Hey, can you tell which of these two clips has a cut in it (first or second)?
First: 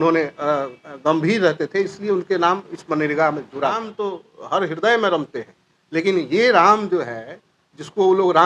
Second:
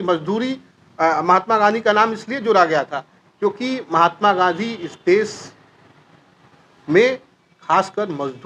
first